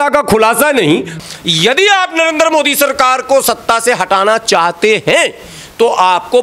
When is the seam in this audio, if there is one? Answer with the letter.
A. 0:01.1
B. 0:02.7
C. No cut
A